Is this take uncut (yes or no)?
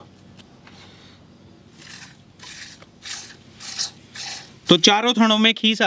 yes